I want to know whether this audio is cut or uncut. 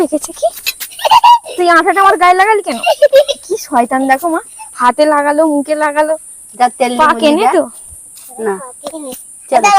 uncut